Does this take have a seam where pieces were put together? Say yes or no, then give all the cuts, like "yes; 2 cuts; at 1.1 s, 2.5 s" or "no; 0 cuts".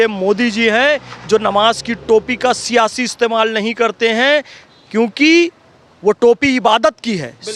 no; 0 cuts